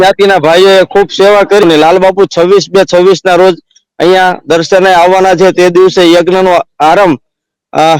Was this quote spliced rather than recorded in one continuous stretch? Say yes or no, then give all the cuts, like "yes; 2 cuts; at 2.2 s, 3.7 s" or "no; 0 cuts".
yes; 1 cut; at 1.6 s